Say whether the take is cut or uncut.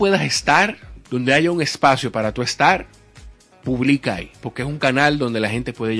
uncut